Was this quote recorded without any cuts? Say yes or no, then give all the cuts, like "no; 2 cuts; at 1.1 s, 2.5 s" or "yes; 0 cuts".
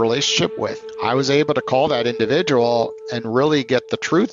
yes; 0 cuts